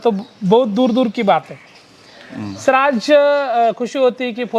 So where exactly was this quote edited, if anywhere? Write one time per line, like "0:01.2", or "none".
none